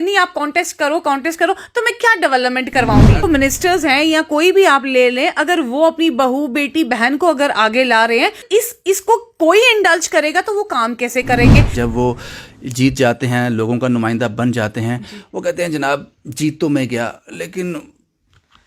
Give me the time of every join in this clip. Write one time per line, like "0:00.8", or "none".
0:03.2
0:08.4
0:11.8